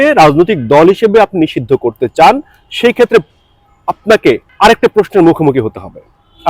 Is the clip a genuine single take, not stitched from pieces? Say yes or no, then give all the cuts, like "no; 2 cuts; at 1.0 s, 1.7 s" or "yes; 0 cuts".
no; 1 cut; at 4.5 s